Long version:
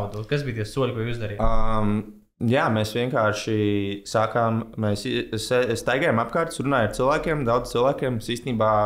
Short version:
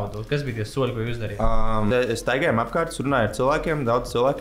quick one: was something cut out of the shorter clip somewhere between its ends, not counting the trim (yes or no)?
yes